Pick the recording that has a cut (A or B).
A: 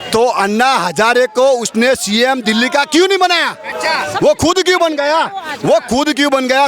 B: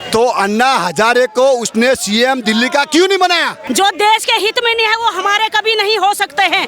B